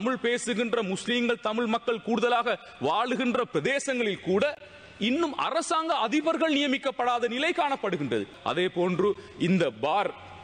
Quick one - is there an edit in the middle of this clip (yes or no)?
yes